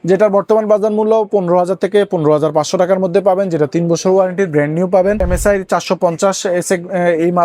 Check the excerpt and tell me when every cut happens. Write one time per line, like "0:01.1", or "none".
0:05.3

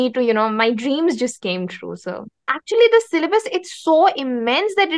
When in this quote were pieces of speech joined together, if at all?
0:02.6

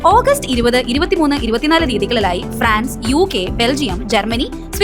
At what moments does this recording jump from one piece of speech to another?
none

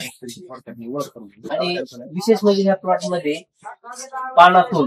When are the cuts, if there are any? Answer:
0:01.5

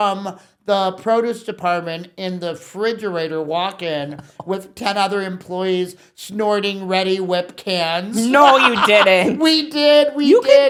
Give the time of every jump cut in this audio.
none

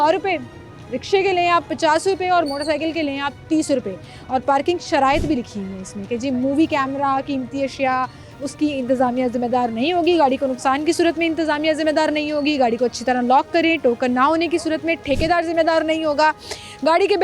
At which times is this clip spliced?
none

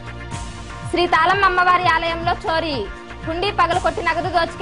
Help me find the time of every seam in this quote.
0:00.9

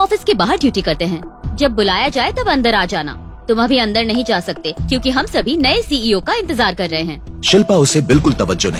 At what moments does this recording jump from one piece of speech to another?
none

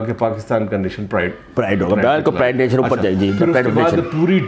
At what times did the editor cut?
none

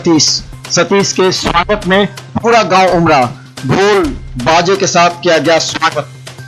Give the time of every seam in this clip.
none

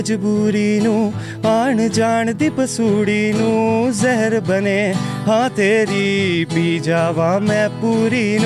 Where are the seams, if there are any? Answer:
none

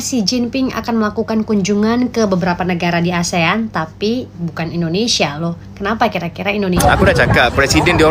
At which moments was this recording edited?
0:06.8

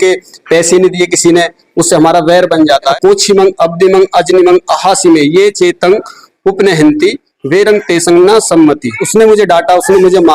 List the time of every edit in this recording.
0:02.9
0:09.0

